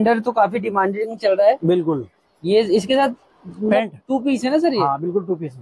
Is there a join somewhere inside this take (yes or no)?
no